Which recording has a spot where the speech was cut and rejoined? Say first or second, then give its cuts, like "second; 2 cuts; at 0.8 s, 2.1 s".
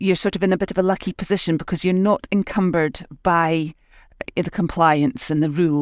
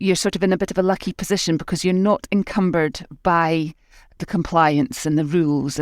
second; 1 cut; at 4.2 s